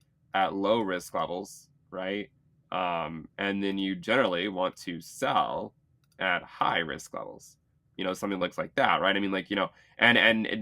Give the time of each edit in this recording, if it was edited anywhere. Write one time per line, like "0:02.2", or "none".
none